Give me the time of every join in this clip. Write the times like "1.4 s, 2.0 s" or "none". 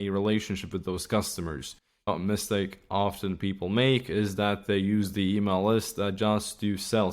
2.1 s